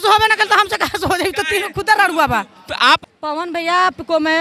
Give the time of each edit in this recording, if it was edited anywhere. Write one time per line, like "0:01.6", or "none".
0:03.0